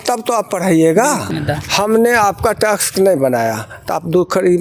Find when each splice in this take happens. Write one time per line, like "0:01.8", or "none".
0:01.3